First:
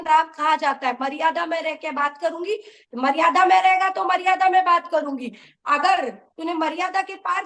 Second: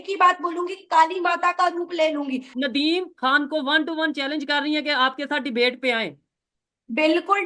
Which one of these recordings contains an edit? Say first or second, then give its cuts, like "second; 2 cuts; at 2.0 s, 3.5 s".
second; 1 cut; at 2.5 s